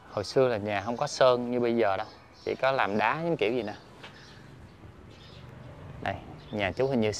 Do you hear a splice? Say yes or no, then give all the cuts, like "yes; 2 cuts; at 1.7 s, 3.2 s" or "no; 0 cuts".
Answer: no; 0 cuts